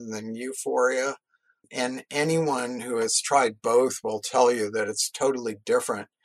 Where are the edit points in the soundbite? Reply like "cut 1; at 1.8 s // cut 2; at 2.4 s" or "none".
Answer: cut 1; at 1.6 s